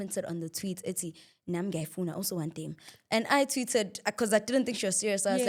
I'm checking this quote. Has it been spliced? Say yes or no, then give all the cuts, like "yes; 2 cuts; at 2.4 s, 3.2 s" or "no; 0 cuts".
no; 0 cuts